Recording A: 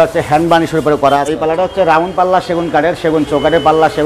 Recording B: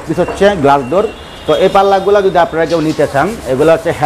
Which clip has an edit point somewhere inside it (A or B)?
A